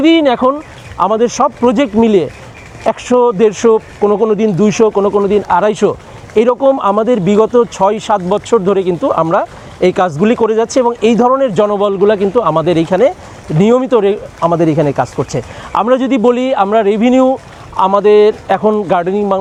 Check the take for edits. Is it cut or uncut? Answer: uncut